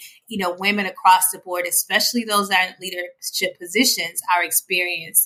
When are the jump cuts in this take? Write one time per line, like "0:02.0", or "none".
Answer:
none